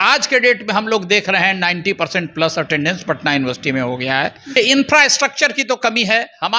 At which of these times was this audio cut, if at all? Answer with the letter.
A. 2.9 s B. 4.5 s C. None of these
B